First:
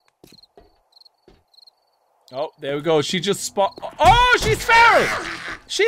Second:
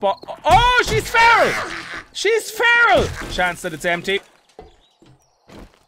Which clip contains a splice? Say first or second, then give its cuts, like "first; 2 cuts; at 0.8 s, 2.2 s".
second; 1 cut; at 3.3 s